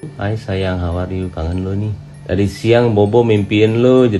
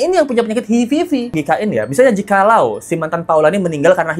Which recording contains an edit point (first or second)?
second